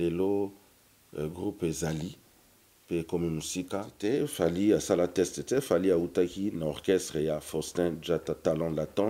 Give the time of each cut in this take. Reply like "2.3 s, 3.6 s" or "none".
3.9 s